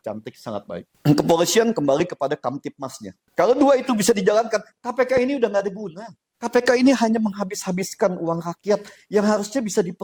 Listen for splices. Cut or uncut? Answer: uncut